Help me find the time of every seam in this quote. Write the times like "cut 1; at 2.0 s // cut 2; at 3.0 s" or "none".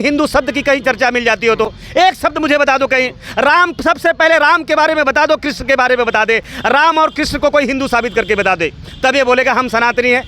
none